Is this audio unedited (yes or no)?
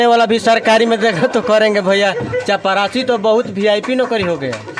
yes